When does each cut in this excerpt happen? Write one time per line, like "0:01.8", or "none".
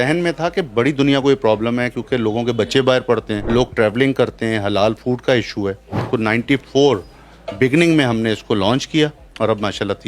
0:03.4
0:06.0

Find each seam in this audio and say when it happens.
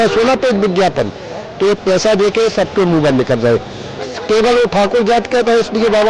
0:04.0

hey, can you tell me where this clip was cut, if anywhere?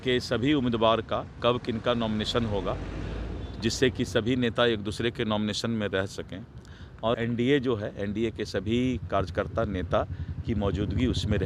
none

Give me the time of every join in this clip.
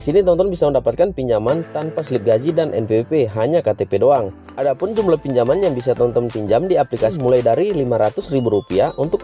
0:04.4
0:07.1

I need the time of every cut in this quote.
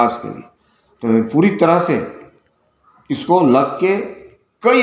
none

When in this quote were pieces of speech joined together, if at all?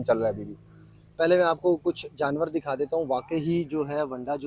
none

